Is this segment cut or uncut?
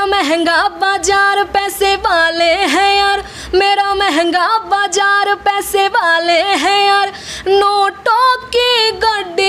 uncut